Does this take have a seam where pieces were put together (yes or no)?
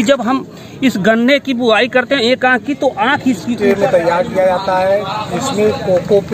yes